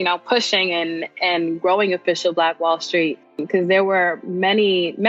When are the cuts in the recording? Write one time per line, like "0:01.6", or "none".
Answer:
0:03.4